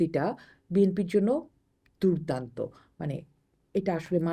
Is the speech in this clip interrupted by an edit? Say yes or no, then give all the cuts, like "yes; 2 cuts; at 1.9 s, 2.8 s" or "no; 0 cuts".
no; 0 cuts